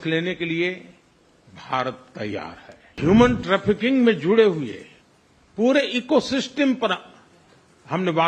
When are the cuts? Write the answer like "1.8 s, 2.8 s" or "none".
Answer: 3.0 s

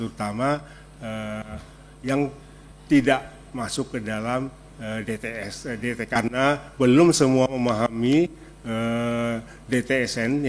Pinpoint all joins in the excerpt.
6.2 s

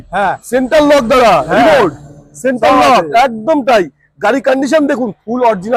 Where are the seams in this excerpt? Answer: none

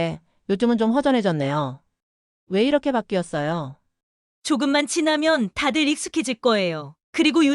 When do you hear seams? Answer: 4.3 s

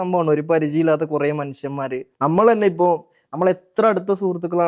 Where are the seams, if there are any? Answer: none

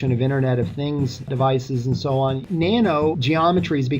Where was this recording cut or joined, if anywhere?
2.4 s, 3.2 s

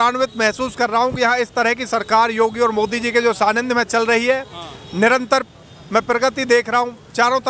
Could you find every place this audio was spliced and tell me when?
none

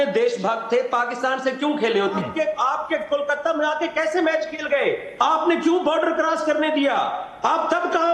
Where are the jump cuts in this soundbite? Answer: 2.1 s

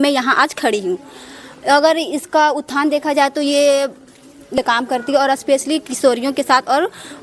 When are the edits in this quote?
none

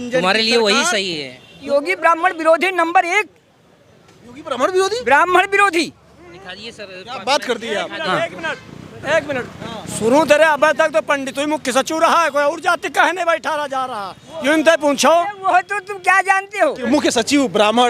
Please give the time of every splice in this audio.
1.6 s, 16.8 s

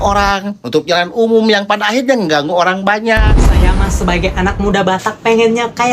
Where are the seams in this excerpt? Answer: 3.4 s

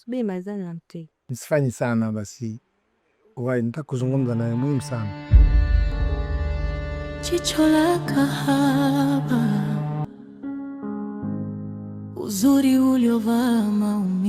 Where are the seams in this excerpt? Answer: 5.0 s, 6.9 s

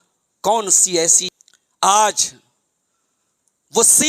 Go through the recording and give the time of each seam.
1.3 s

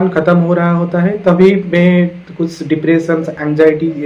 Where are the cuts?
none

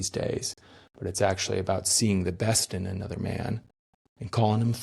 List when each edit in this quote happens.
none

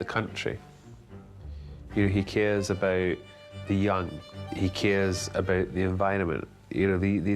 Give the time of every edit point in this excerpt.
4.4 s

